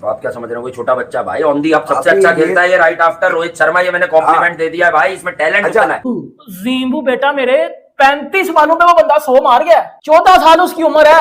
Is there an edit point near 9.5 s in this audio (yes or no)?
no